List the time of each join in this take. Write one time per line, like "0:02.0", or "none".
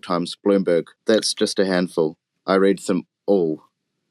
0:00.9